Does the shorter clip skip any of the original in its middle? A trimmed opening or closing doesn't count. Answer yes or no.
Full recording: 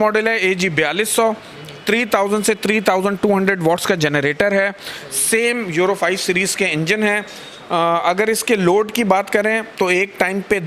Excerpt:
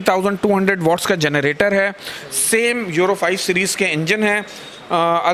no